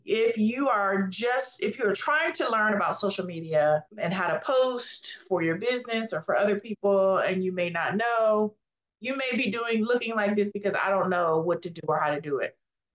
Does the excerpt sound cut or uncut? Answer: uncut